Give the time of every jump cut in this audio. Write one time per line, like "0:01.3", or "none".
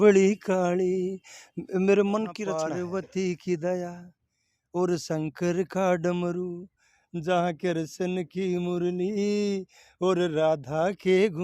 0:02.6